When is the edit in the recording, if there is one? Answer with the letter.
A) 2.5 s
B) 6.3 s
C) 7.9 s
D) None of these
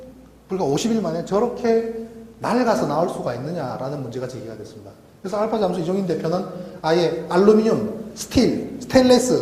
C